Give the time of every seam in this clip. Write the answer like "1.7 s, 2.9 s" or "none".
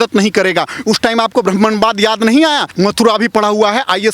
2.7 s